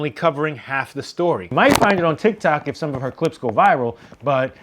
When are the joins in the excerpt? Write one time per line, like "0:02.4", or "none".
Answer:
0:01.5